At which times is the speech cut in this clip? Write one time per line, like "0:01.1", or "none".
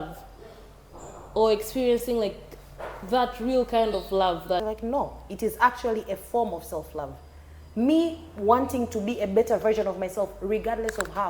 0:04.6